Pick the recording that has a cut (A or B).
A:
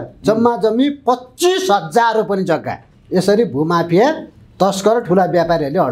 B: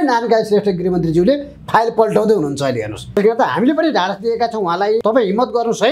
B